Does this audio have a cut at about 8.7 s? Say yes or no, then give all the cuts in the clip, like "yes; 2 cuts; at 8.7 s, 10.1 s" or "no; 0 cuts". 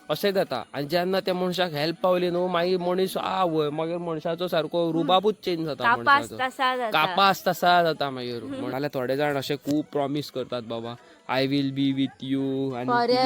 yes; 1 cut; at 8.7 s